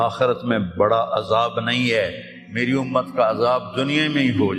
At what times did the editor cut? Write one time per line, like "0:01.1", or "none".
none